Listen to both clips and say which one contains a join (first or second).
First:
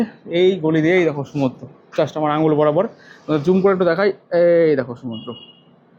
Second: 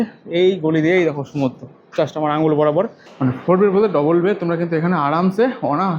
second